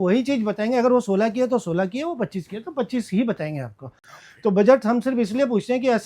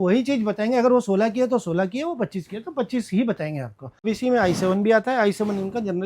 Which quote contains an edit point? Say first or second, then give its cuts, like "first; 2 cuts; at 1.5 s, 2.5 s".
second; 1 cut; at 3.9 s